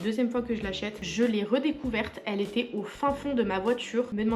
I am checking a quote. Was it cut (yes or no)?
yes